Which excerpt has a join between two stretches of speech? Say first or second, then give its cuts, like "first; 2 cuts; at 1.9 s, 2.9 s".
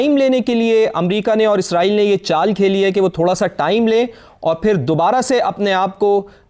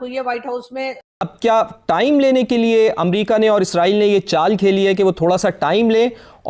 second; 1 cut; at 1.0 s